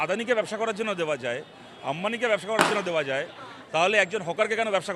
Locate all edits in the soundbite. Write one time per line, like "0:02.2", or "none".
none